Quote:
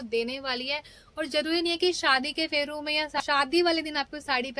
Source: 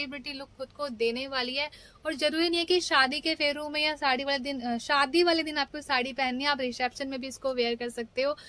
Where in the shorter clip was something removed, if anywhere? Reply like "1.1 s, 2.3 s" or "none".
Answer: 3.2 s